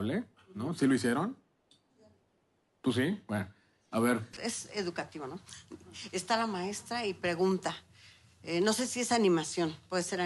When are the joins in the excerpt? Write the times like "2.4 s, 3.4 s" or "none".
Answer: none